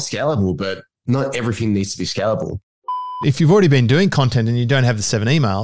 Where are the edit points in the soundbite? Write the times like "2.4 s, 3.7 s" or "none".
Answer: 1.0 s, 2.7 s